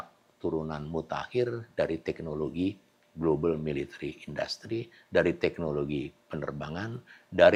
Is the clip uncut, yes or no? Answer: yes